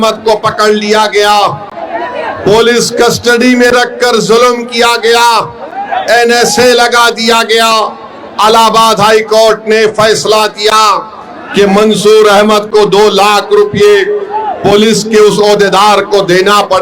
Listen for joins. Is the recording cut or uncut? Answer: uncut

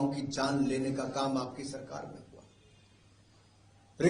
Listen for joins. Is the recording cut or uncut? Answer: uncut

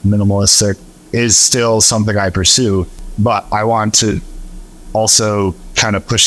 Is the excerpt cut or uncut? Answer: cut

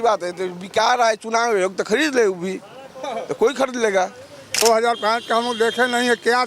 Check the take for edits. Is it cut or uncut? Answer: cut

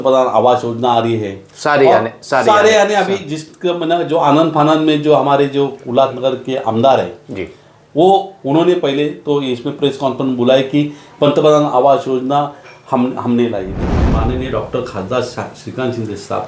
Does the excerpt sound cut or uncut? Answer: cut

